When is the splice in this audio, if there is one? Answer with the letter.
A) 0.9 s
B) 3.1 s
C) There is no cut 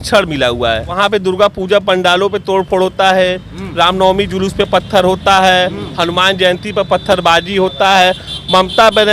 A